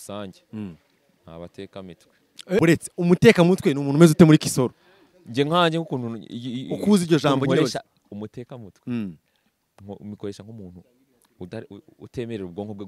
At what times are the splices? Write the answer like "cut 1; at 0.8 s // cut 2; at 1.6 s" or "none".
cut 1; at 2.6 s